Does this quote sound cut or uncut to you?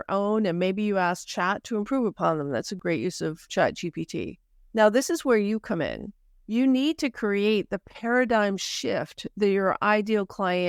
uncut